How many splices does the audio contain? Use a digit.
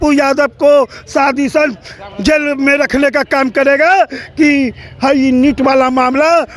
0